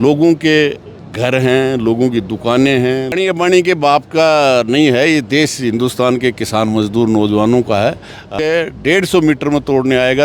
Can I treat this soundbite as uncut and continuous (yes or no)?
no